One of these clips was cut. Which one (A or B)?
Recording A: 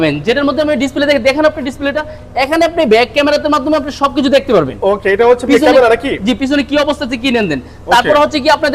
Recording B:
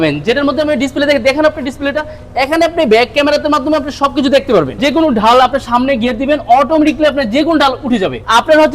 B